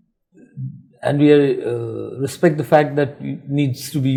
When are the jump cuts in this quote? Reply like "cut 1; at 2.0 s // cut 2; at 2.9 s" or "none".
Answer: none